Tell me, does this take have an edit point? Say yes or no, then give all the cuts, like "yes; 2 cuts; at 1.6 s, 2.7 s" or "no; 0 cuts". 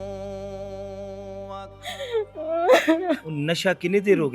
no; 0 cuts